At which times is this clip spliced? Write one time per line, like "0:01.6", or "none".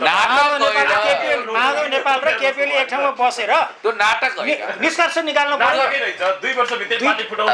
none